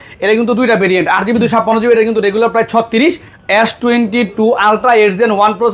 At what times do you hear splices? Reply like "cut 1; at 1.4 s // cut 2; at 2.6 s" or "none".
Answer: cut 1; at 3.3 s